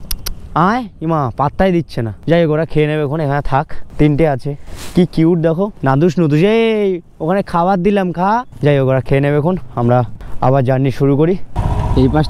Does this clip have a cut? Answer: no; 0 cuts

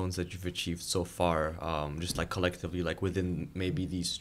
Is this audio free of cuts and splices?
yes; 0 cuts

